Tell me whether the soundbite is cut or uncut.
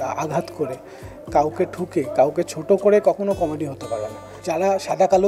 cut